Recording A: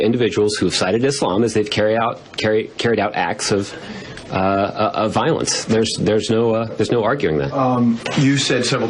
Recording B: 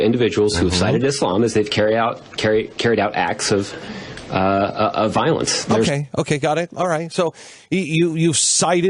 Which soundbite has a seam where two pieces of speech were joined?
A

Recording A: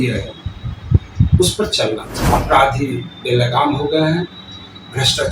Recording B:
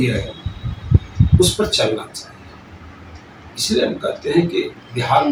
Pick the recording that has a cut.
A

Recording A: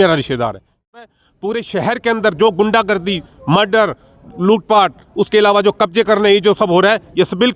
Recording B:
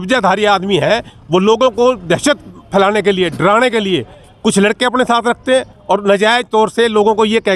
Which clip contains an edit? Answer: A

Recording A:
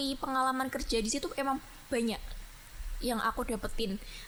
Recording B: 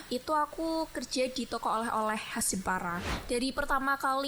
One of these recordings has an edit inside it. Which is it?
B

